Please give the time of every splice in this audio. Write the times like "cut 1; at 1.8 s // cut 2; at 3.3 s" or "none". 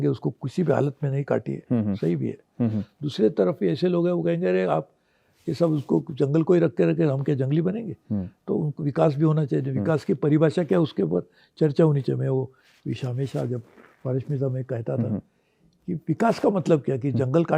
none